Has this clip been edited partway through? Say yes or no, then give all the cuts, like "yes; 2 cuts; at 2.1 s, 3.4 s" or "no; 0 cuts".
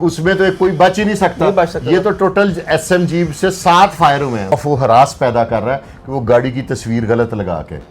yes; 1 cut; at 4.5 s